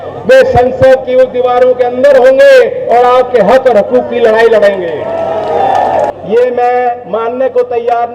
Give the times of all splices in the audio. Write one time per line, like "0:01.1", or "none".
0:06.2